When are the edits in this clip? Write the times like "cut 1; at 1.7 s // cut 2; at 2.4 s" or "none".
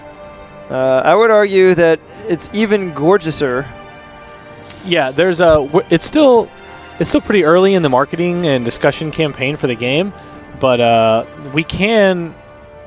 cut 1; at 3.7 s